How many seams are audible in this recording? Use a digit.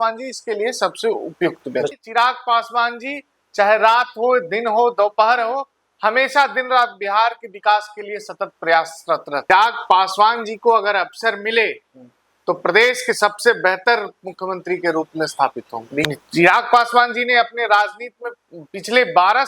3